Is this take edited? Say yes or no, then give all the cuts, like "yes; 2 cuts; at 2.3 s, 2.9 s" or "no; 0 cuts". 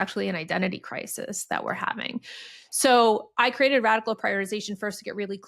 no; 0 cuts